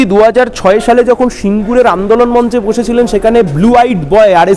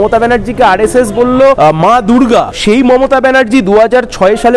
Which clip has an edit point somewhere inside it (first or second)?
second